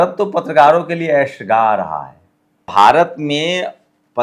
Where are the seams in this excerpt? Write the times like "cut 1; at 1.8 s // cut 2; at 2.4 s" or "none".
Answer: cut 1; at 2.6 s